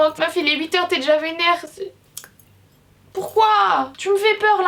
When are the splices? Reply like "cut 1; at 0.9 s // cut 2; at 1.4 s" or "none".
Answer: none